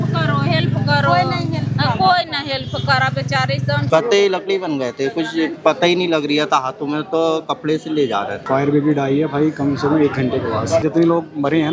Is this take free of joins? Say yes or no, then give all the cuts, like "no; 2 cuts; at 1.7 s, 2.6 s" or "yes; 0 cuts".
no; 3 cuts; at 3.8 s, 8.4 s, 10.8 s